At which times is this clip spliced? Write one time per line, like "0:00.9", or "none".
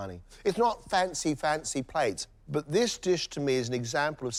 none